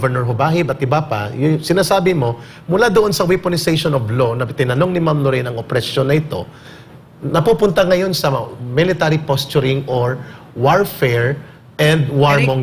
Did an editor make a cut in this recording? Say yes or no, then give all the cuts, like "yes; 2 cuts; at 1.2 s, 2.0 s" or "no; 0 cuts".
no; 0 cuts